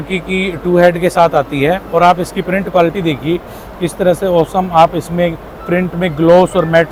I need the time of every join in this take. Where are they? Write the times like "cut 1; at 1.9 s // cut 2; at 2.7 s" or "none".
none